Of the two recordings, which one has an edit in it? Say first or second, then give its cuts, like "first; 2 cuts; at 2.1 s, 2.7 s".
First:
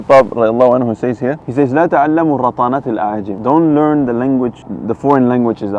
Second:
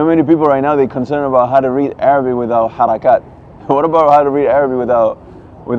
first; 3 cuts; at 1.4 s, 3.3 s, 4.7 s